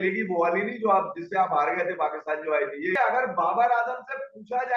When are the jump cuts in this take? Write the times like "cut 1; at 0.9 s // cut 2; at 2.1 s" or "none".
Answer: cut 1; at 2.9 s